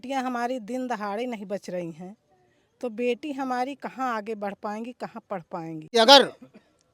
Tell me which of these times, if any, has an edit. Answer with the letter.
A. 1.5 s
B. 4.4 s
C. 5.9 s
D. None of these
C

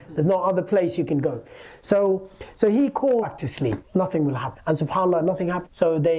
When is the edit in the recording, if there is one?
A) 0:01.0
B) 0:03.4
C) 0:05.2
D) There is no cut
B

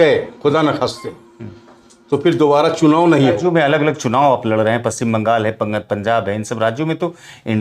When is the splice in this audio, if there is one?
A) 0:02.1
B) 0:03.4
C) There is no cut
B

